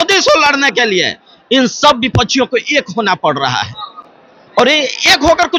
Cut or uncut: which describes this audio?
uncut